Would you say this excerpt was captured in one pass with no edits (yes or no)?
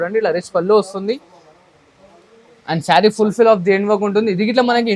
yes